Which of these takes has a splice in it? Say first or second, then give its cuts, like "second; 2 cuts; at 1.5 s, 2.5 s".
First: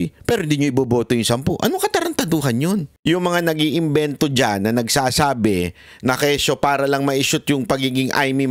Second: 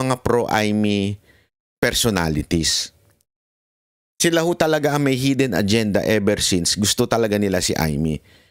first; 1 cut; at 2.9 s